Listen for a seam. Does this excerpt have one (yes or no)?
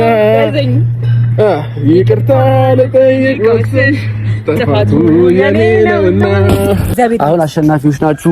yes